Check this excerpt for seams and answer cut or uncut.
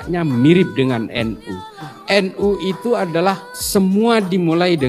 cut